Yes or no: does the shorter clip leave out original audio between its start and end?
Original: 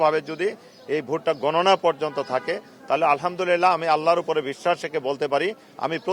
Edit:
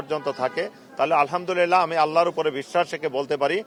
no